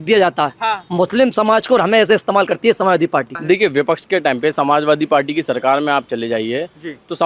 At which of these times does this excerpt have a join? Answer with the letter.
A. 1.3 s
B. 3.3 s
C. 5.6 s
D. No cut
B